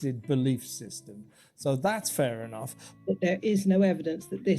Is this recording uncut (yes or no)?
no